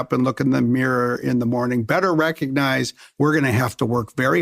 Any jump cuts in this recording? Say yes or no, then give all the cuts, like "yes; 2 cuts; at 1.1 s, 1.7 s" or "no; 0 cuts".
yes; 1 cut; at 3.0 s